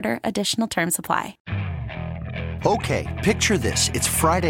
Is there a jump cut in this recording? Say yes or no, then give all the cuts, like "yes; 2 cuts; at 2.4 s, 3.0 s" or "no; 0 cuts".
yes; 1 cut; at 1.4 s